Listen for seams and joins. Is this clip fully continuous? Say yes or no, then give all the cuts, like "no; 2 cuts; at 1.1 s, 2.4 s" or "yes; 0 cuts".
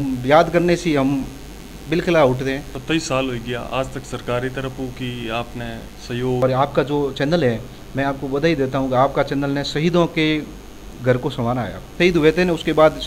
no; 3 cuts; at 2.7 s, 6.4 s, 11.9 s